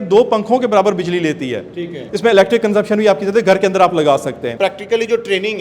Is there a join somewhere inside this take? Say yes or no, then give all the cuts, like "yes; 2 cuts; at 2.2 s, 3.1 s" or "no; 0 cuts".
yes; 2 cuts; at 2.0 s, 4.5 s